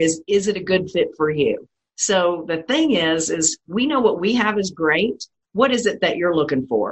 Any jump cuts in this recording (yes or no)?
no